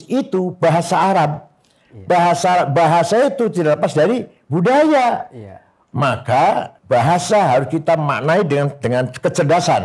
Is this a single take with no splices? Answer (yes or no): no